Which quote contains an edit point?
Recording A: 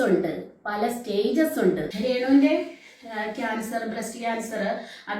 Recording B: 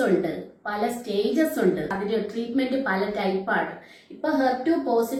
A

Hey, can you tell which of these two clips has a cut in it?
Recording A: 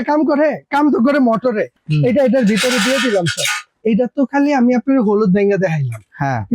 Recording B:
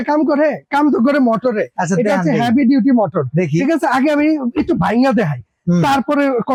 A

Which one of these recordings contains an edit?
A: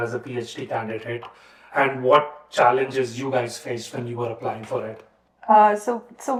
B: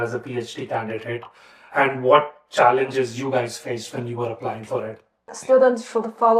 B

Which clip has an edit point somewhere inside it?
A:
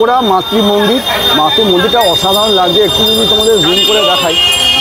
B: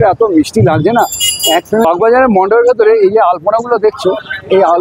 B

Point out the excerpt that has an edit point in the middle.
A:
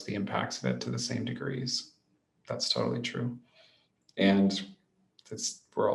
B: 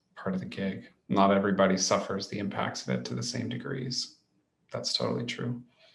B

